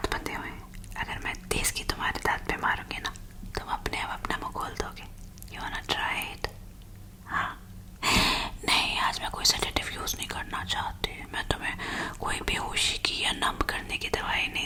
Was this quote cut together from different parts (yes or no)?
no